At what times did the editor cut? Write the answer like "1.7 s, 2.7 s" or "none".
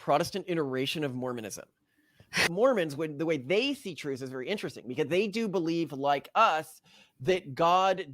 2.5 s